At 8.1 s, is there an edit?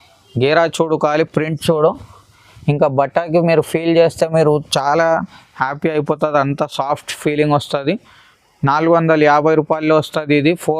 no; 0 cuts

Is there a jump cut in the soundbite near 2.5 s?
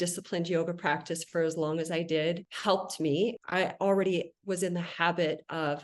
yes; 2 cuts; at 2.5 s, 3.4 s

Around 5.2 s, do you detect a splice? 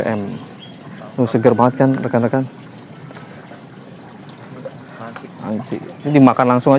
yes; 1 cut; at 5.2 s

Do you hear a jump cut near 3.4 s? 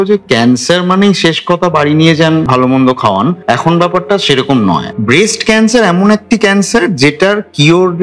yes; 3 cuts; at 2.5 s, 3.4 s, 4.9 s

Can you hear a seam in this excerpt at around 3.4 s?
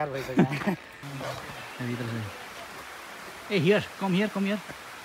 no; 1 cut; at 1.0 s

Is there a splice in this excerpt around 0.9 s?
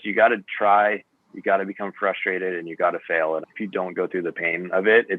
no; 1 cut; at 3.4 s

